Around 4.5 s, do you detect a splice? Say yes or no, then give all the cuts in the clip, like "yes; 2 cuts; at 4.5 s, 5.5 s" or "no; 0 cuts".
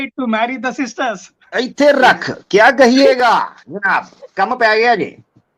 no; 1 cut; at 1.3 s